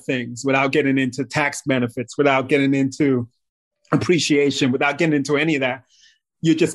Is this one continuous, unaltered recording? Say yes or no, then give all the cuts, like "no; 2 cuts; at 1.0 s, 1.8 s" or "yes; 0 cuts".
yes; 0 cuts